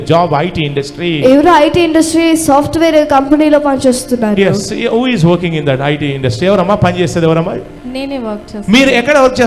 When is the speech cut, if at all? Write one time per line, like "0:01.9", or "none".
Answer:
none